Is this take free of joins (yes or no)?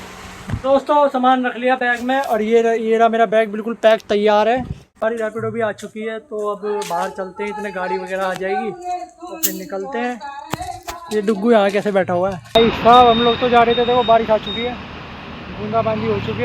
no